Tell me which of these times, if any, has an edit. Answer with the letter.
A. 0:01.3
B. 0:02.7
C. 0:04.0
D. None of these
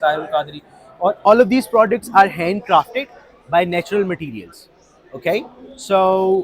A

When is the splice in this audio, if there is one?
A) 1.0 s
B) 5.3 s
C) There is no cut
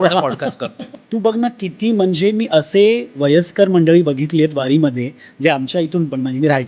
A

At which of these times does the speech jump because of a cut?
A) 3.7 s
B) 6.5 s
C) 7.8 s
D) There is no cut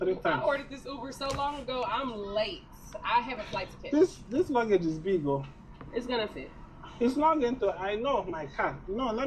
B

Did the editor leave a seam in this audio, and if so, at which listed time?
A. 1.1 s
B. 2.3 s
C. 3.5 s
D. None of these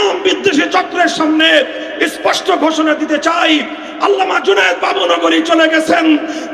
D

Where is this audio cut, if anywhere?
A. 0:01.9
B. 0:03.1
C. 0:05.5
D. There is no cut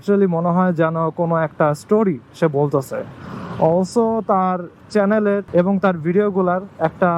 C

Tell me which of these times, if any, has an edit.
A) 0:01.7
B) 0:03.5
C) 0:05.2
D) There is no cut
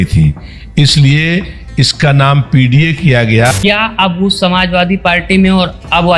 B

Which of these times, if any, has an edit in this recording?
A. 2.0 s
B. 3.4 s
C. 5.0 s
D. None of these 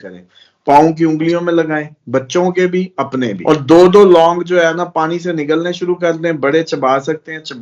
B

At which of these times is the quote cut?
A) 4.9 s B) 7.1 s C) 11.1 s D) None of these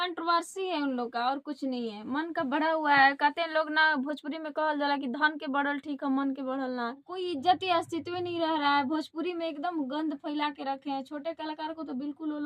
B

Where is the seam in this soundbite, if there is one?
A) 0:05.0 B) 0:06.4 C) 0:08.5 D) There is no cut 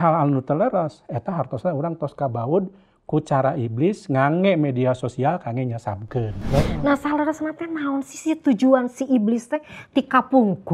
B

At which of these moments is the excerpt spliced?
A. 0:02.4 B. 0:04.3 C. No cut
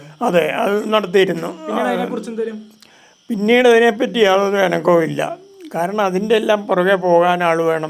C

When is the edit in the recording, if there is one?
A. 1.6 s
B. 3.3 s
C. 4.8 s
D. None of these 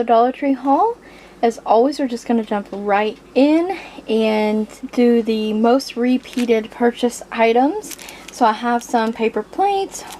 C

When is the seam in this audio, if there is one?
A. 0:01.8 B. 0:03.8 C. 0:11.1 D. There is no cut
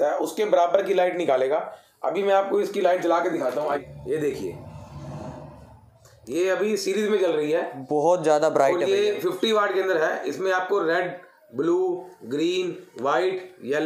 B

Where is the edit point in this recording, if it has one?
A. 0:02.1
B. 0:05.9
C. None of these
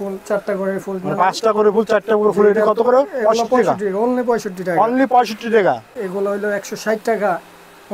B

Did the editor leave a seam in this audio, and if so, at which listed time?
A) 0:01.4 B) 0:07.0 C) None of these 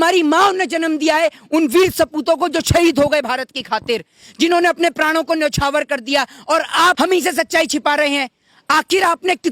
B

